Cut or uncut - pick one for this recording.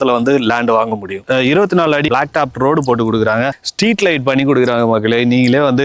uncut